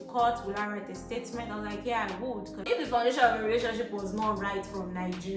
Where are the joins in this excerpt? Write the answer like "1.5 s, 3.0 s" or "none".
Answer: 2.7 s